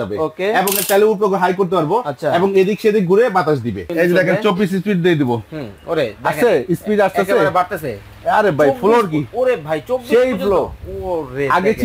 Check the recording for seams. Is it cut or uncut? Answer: cut